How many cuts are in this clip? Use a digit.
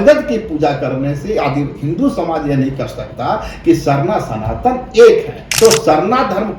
1